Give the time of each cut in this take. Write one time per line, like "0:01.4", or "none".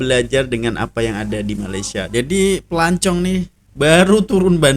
0:02.1